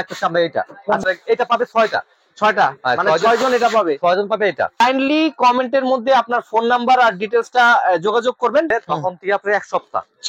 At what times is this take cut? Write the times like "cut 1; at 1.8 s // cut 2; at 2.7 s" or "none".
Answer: cut 1; at 1.0 s // cut 2; at 4.7 s // cut 3; at 8.7 s